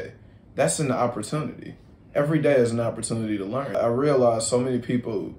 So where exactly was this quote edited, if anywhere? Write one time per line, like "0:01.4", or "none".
0:03.8